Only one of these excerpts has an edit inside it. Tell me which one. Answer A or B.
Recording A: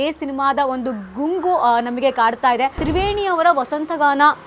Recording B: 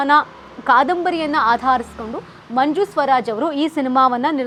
A